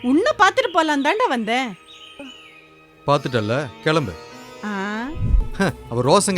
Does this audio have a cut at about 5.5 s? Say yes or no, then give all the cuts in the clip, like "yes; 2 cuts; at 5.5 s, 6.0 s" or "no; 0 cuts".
yes; 1 cut; at 5.5 s